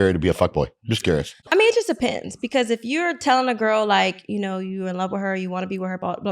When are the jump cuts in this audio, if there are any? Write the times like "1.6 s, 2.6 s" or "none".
1.5 s